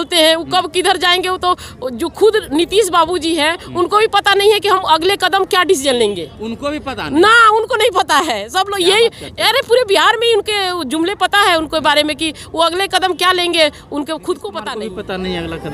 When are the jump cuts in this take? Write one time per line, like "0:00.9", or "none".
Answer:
0:14.6